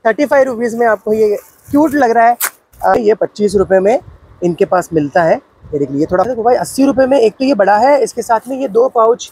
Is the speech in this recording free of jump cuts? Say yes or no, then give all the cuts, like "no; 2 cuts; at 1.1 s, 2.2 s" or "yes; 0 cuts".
no; 2 cuts; at 2.9 s, 6.3 s